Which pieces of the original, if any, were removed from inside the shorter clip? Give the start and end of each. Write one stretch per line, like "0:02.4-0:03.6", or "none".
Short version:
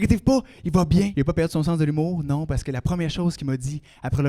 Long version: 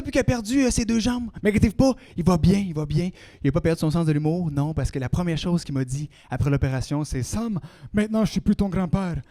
0:02.6-0:03.4